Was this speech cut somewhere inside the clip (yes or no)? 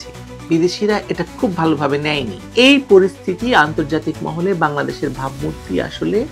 no